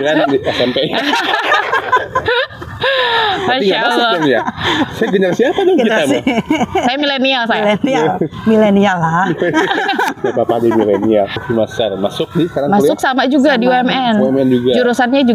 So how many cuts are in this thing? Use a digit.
1